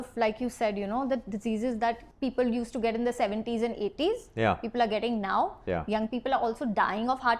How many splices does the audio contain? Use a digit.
1